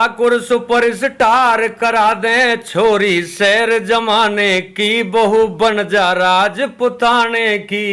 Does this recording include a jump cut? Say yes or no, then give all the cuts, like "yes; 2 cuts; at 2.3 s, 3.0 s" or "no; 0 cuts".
no; 0 cuts